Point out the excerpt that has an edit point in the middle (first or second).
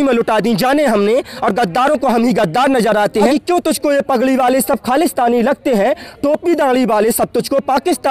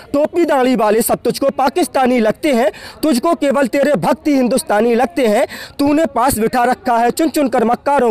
first